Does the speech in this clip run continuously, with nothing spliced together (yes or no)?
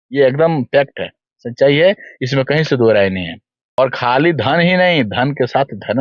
no